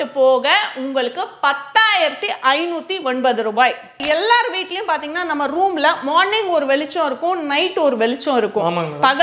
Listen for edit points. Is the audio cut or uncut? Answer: cut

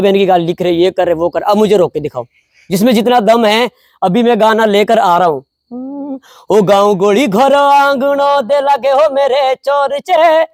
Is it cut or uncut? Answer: uncut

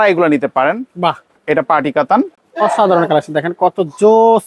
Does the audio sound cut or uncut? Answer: cut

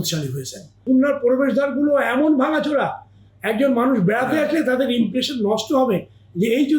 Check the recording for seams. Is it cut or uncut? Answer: cut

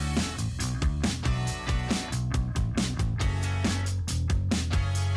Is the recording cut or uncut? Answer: cut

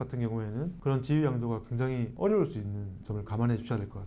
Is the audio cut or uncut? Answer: uncut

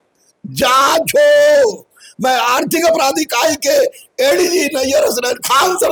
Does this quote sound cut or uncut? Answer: uncut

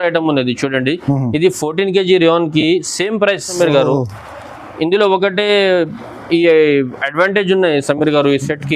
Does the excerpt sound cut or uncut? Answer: cut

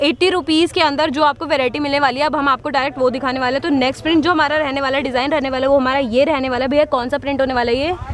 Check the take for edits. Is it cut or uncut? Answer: uncut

